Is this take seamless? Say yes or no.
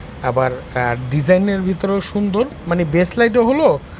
yes